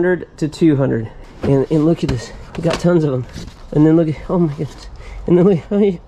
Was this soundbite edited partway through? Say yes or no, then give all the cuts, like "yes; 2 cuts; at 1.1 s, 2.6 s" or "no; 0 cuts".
yes; 1 cut; at 1.2 s